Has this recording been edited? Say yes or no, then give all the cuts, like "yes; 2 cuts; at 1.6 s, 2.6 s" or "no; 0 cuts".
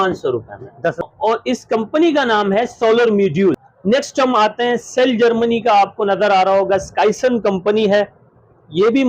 yes; 2 cuts; at 1.0 s, 3.7 s